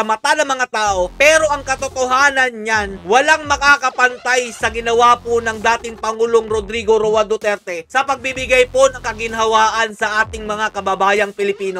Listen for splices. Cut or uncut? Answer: uncut